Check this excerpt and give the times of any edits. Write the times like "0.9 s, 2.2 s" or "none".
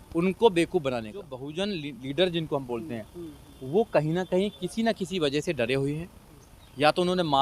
1.4 s